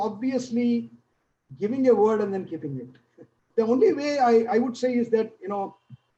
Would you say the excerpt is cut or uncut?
cut